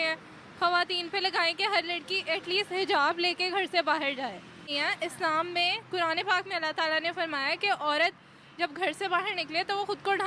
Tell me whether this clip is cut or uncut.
cut